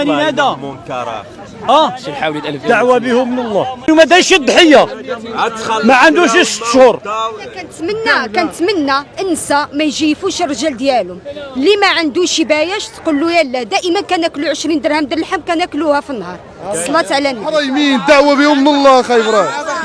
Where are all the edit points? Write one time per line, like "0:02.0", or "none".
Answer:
0:03.9
0:07.8
0:17.6